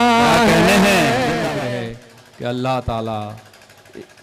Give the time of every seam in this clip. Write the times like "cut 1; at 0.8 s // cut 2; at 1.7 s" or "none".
cut 1; at 1.5 s